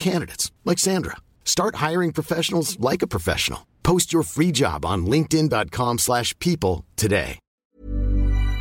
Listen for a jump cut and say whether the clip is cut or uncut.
cut